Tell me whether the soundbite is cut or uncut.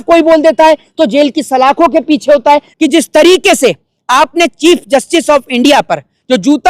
cut